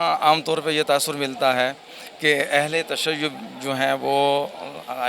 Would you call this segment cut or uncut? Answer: uncut